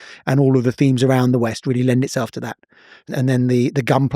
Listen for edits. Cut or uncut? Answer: cut